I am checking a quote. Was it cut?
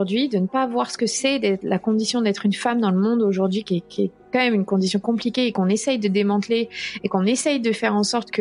no; 0 cuts

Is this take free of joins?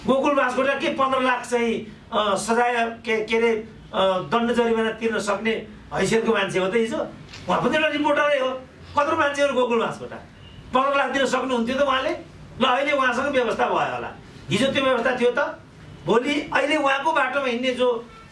yes; 0 cuts

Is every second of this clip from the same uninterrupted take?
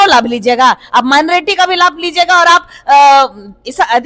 yes; 0 cuts

